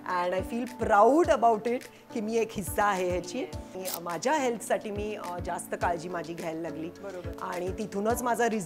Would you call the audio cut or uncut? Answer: cut